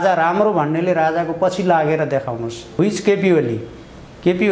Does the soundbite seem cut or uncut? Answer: cut